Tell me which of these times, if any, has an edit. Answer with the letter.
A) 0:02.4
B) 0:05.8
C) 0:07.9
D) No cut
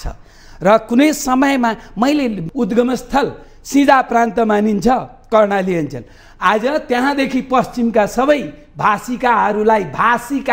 A